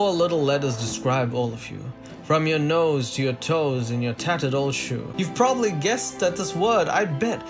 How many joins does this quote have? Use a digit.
1